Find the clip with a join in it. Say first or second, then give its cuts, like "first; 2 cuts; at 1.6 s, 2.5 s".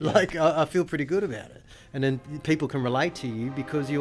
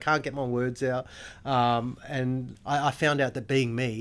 second; 1 cut; at 2.5 s